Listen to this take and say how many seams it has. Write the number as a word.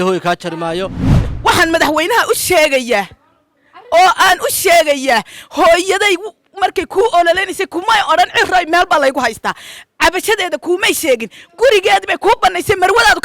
one